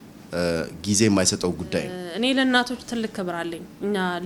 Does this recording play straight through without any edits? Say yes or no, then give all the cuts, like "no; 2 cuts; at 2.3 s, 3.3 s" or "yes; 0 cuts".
no; 1 cut; at 2.0 s